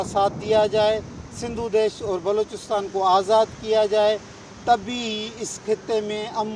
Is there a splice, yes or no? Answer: no